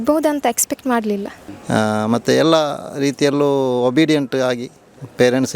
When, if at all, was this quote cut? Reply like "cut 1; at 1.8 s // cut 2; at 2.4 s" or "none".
cut 1; at 1.3 s